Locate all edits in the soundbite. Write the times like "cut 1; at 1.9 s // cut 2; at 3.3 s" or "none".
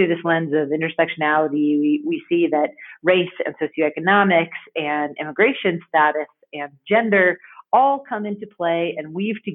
none